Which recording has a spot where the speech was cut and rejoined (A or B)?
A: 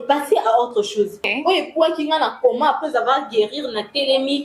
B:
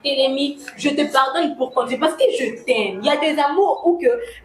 A